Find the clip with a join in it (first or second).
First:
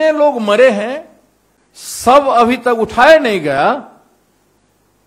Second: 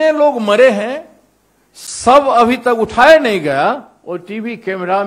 second